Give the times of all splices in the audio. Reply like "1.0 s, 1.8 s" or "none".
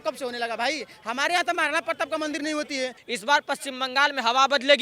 3.0 s